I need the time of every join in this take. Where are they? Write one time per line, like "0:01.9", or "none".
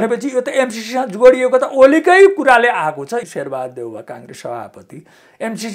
0:03.3